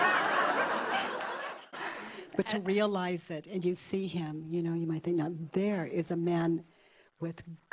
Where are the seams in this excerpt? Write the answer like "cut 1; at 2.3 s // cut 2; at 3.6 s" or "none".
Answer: cut 1; at 1.5 s